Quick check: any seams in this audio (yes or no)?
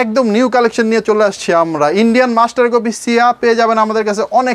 no